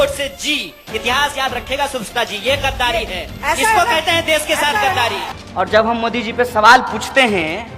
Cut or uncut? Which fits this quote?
cut